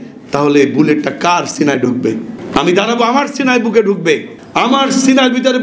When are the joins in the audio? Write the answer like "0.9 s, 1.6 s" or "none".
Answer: 2.3 s, 4.4 s